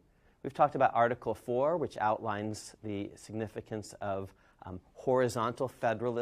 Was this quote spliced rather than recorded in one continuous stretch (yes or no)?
yes